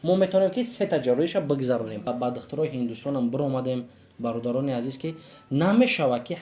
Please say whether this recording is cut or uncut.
cut